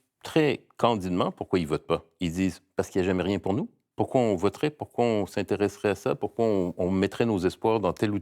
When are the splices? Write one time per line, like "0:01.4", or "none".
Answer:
0:02.1
0:03.8